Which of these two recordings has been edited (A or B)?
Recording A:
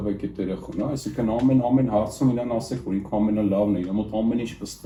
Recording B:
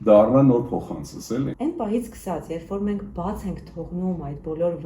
B